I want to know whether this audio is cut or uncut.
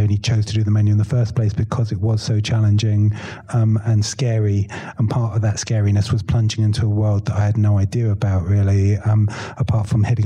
uncut